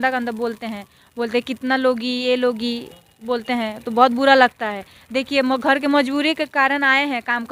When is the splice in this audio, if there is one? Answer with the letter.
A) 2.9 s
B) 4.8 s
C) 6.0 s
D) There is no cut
D